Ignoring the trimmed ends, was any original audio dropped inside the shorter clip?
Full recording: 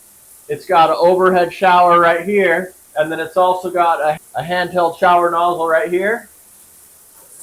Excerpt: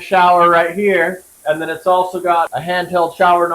yes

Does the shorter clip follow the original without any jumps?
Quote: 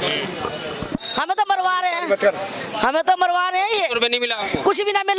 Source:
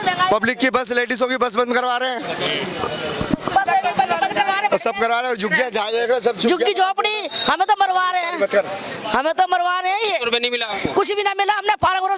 no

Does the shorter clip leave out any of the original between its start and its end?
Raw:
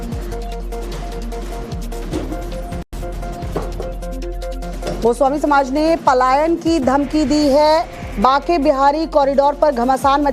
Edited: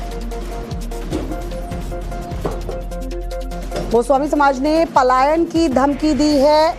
yes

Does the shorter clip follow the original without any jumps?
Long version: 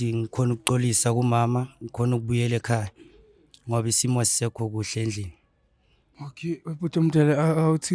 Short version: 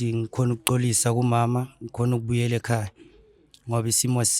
yes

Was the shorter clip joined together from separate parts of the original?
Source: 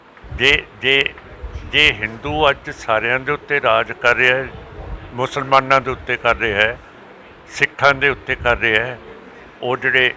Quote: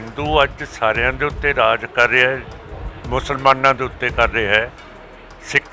no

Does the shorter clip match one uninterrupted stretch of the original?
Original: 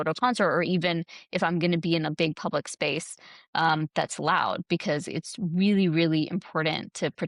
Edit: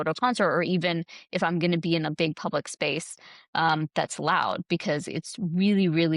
yes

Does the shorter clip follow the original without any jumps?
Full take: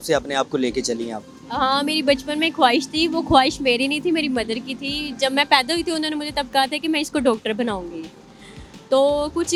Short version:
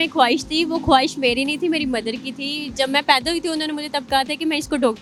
yes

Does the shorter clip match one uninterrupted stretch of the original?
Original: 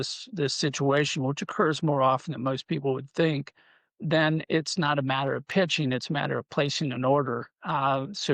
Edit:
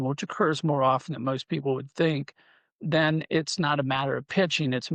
yes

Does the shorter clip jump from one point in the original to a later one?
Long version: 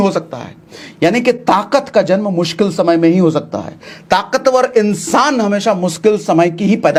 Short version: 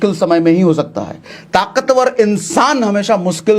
no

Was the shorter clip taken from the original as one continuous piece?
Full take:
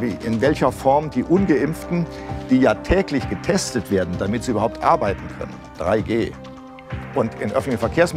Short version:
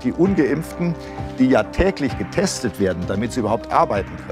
yes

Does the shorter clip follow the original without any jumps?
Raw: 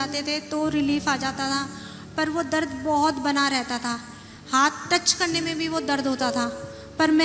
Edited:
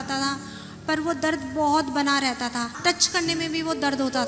no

